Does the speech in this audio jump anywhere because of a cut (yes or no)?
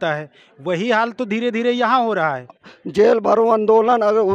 yes